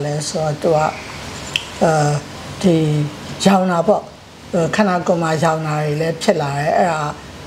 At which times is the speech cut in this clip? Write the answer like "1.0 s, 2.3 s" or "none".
none

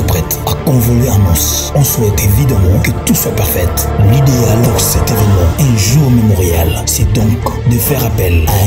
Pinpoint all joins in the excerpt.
none

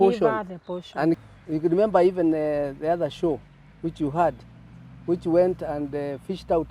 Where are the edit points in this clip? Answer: 1.2 s

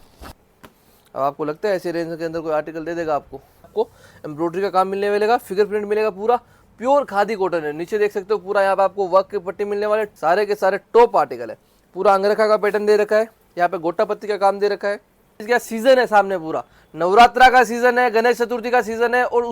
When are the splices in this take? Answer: 3.7 s, 10.1 s, 15.4 s

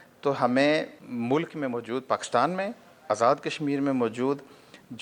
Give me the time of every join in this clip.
1.0 s

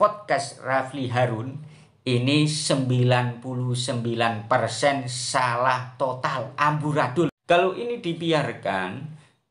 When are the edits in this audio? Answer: 7.4 s

